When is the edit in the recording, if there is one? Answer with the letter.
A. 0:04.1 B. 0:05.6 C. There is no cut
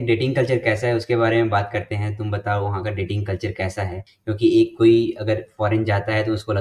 A